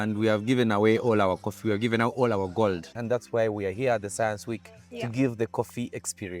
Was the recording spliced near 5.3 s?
no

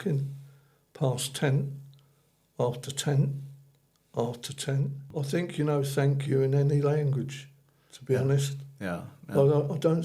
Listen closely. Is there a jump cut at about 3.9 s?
no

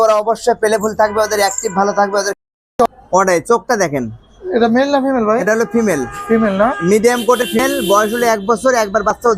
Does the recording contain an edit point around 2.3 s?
yes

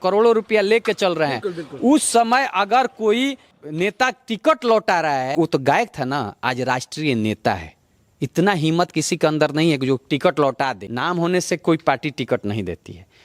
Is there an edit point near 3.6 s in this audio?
yes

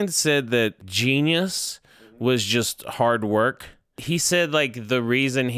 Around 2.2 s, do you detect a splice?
no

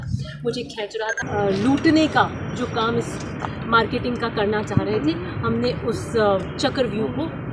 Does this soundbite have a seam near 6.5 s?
yes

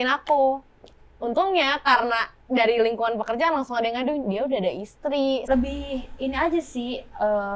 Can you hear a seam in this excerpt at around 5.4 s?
yes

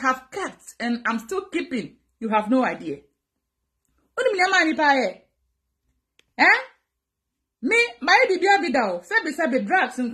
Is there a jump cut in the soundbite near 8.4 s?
no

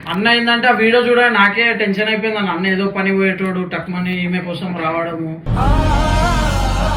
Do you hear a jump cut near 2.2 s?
no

